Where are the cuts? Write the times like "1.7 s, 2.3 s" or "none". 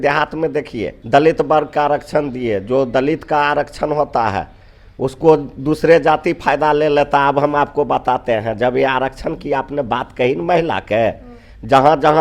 1.0 s